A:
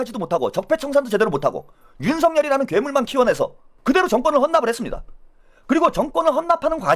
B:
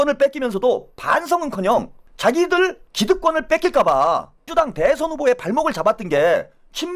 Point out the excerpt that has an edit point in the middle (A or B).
B